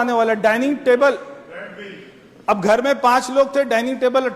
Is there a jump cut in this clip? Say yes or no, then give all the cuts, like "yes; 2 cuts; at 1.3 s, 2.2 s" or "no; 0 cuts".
no; 0 cuts